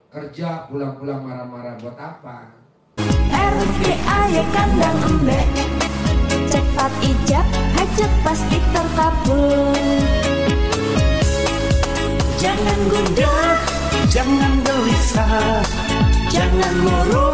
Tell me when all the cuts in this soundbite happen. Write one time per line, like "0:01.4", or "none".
0:02.9